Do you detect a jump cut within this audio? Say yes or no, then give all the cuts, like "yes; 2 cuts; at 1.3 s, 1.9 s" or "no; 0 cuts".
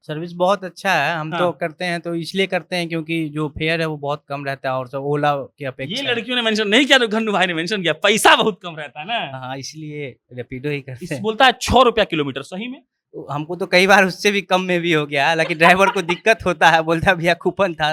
no; 0 cuts